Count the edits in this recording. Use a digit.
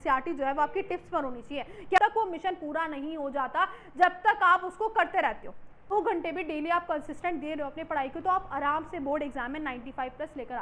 2